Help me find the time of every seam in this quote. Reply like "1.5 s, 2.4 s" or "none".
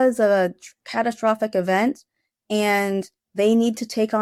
none